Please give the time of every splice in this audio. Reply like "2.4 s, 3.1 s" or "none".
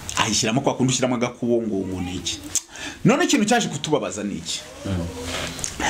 none